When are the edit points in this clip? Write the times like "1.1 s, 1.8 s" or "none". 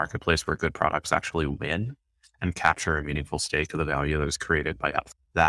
none